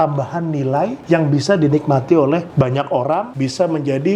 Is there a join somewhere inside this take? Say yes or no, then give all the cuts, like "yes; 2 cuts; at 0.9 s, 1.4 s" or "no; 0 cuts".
yes; 3 cuts; at 1.0 s, 2.5 s, 3.3 s